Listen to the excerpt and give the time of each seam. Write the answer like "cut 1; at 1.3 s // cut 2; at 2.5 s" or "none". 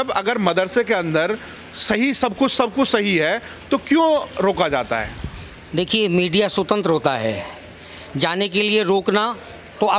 none